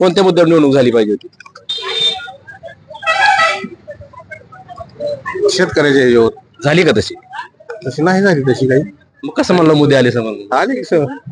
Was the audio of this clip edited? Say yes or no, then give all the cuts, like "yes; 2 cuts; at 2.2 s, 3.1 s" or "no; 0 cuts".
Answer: no; 0 cuts